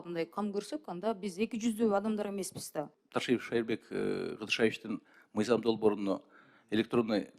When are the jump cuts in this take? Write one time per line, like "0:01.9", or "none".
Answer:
0:03.0